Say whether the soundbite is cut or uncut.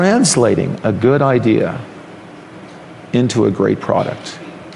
uncut